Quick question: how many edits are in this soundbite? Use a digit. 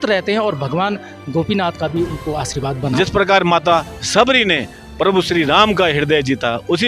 1